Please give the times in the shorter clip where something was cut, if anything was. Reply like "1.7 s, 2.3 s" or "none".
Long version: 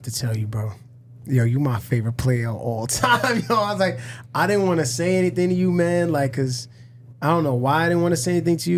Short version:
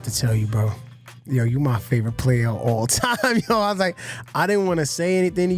none